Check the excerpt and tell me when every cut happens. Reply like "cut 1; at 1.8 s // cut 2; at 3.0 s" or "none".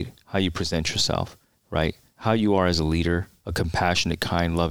cut 1; at 1.9 s // cut 2; at 3.4 s